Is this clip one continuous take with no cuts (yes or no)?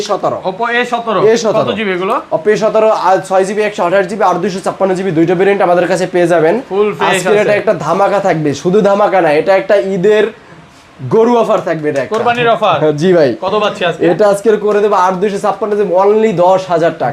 yes